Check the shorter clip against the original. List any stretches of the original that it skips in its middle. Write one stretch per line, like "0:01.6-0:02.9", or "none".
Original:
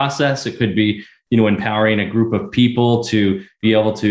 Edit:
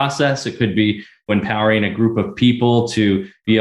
0:01.3-0:01.5